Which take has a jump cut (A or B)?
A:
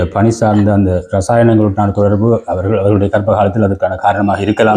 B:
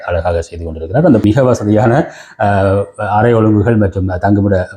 B